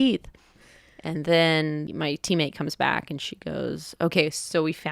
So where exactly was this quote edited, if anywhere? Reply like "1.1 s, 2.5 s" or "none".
1.9 s